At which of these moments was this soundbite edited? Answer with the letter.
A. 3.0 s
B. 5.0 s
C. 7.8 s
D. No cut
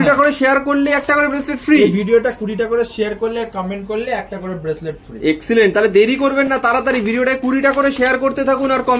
D